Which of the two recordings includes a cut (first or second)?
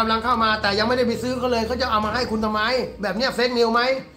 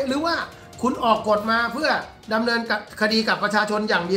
second